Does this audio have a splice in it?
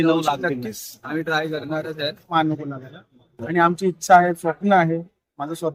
yes; 1 cut; at 2.3 s

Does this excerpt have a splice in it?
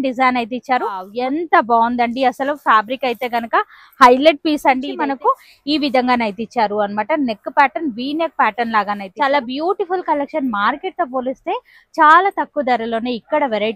yes; 3 cuts; at 1.1 s, 4.9 s, 9.1 s

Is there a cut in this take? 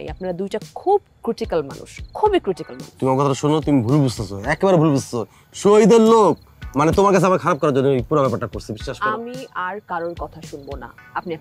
no; 0 cuts

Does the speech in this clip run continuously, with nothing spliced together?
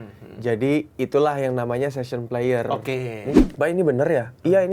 no; 1 cut; at 3.3 s

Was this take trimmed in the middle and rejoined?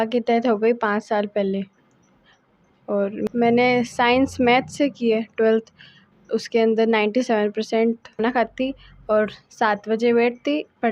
yes; 2 cuts; at 3.3 s, 8.2 s

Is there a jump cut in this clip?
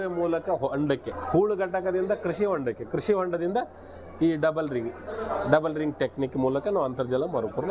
yes; 1 cut; at 1.1 s

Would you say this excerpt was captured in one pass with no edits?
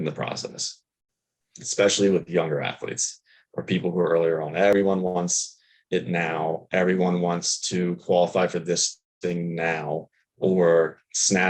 no; 1 cut; at 4.7 s

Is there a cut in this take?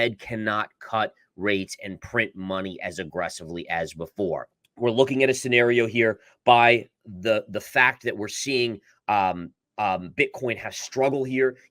yes; 1 cut; at 4.5 s

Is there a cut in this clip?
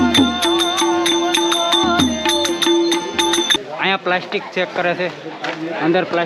no; 0 cuts

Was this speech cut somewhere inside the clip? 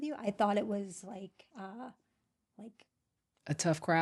no; 0 cuts

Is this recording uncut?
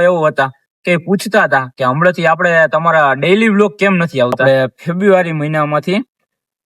no; 1 cut; at 4.4 s

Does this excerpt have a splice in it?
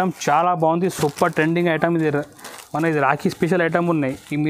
no; 0 cuts

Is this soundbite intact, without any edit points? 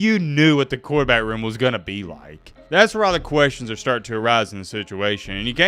no; 1 cut; at 2.5 s

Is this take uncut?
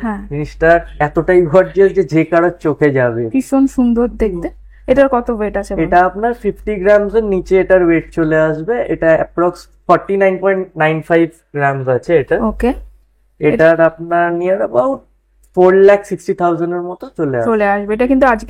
yes; 0 cuts

